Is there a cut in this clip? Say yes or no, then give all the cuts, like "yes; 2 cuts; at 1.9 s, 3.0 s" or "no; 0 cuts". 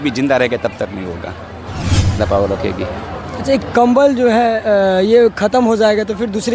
yes; 1 cut; at 2.2 s